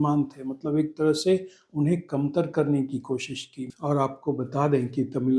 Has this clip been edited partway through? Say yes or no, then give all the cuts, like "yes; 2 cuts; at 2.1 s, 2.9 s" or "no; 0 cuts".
yes; 1 cut; at 3.7 s